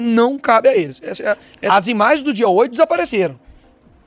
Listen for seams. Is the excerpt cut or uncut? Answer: cut